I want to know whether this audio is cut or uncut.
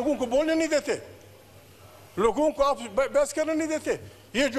uncut